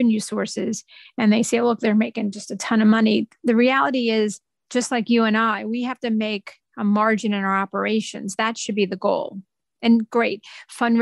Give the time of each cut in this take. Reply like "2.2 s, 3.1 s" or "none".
none